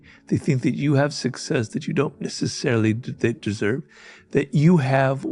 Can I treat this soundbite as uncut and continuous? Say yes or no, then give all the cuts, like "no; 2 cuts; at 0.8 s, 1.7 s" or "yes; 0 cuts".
yes; 0 cuts